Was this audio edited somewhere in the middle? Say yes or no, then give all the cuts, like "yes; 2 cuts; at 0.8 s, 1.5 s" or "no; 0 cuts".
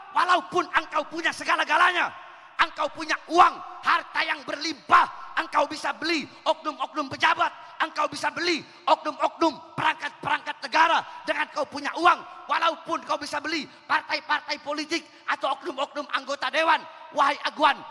no; 0 cuts